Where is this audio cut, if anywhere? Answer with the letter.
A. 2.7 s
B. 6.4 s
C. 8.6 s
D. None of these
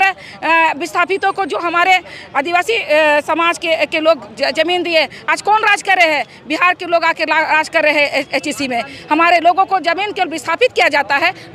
D